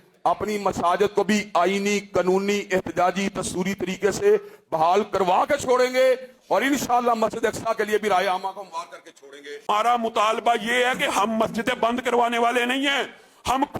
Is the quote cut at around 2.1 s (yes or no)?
no